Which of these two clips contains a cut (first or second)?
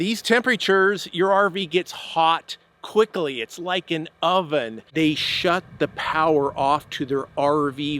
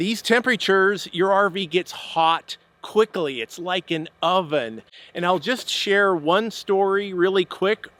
first